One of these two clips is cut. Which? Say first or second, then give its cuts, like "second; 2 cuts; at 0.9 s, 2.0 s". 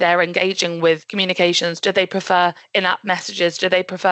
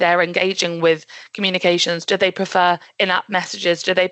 first; 1 cut; at 1.1 s